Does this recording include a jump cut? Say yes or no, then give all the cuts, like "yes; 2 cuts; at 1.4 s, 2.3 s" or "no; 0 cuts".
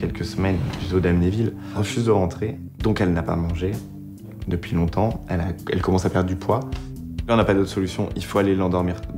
no; 0 cuts